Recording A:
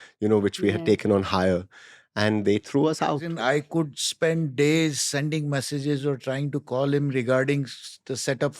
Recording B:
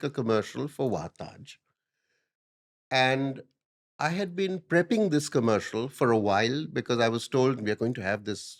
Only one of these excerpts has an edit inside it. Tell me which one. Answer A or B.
A